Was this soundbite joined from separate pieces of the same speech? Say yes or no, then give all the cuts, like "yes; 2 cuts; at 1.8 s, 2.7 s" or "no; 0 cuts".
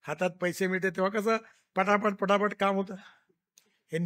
no; 0 cuts